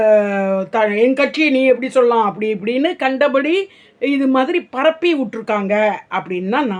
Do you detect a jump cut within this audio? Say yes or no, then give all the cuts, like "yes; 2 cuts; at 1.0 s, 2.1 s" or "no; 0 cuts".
no; 0 cuts